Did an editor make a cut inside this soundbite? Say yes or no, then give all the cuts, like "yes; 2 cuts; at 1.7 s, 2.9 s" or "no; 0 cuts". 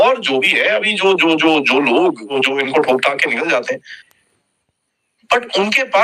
yes; 2 cuts; at 2.4 s, 4.0 s